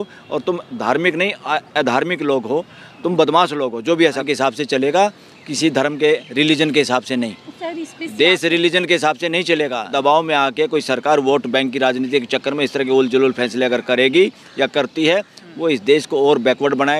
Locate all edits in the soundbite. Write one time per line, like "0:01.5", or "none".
0:04.2
0:09.9